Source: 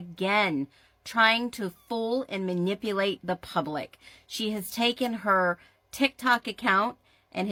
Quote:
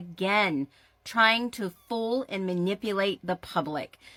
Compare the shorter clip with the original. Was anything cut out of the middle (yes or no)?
no